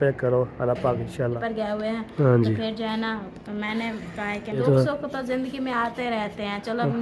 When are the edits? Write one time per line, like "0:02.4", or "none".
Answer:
0:01.4
0:04.6